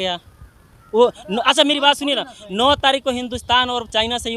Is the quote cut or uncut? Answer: uncut